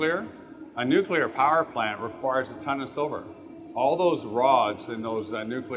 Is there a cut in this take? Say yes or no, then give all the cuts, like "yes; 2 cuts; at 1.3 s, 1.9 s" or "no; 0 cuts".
no; 0 cuts